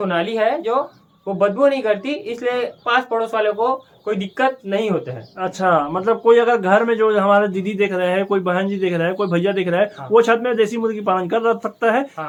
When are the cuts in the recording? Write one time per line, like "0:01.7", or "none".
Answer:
none